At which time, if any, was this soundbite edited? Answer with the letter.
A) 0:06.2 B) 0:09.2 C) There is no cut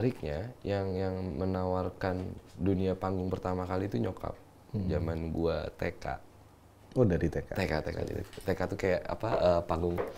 C